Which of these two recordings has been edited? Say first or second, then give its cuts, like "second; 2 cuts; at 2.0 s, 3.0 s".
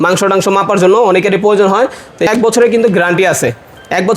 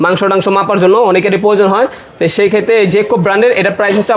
first; 1 cut; at 2.3 s